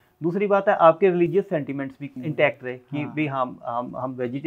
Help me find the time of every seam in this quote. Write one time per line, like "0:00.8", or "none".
0:02.1